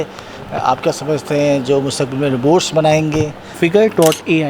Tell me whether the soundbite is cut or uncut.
cut